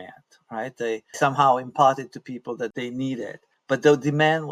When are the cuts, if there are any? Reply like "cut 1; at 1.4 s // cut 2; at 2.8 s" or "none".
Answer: cut 1; at 1.1 s // cut 2; at 2.7 s // cut 3; at 3.5 s